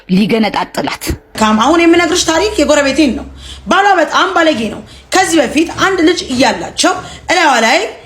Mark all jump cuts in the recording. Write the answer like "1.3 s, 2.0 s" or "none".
1.3 s